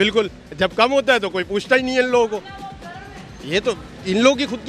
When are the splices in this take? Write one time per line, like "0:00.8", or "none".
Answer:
none